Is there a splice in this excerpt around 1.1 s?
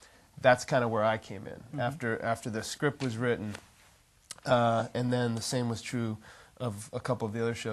yes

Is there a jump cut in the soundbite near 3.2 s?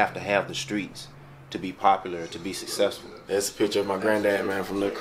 yes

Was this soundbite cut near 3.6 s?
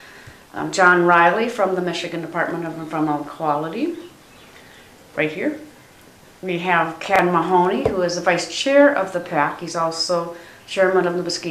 yes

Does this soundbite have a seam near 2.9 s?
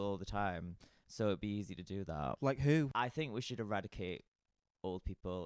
yes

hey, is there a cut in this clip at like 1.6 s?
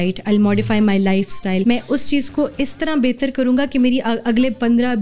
yes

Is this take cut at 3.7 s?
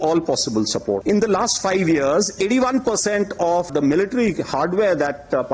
yes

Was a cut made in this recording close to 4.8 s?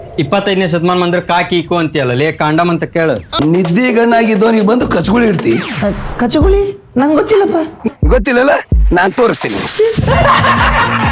no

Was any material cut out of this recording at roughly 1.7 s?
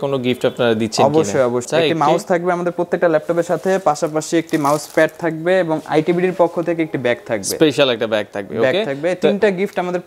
yes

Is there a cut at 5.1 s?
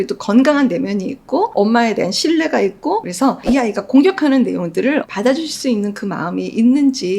yes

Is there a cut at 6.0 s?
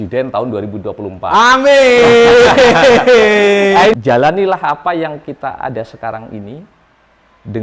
no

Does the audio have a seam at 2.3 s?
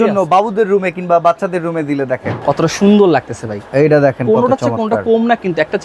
yes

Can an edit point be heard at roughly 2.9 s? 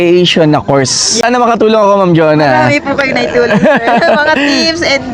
no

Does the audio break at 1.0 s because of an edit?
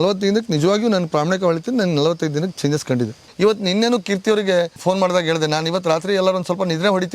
no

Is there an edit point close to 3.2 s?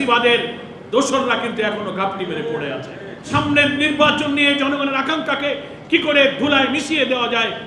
yes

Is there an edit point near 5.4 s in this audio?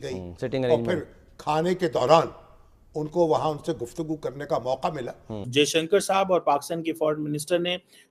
yes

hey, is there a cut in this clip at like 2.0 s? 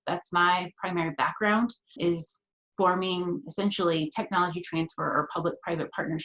yes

